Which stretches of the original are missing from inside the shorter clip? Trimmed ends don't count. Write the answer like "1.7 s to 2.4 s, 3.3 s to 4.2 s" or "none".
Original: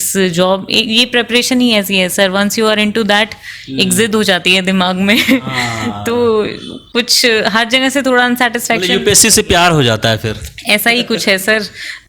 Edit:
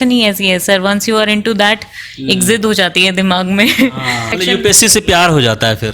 5.9 s to 8.8 s